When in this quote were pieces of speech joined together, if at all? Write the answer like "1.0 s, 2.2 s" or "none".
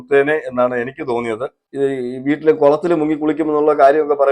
1.6 s

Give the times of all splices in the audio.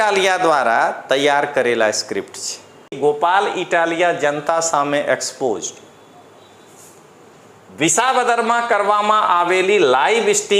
3.0 s

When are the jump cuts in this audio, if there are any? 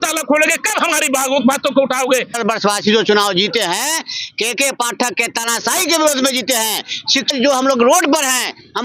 2.4 s, 7.3 s

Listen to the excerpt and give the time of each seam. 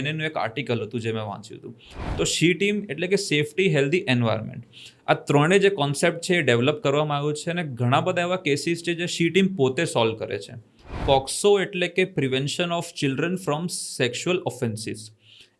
2.0 s, 10.9 s

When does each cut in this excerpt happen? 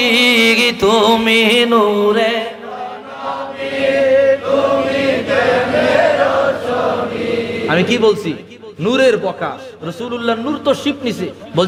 none

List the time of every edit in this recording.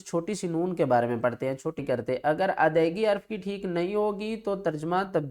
1.8 s

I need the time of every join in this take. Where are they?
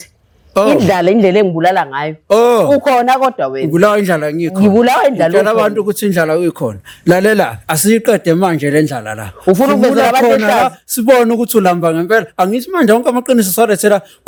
none

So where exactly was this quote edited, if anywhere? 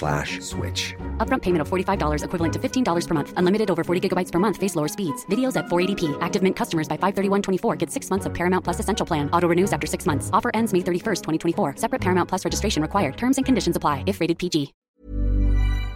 14.8 s

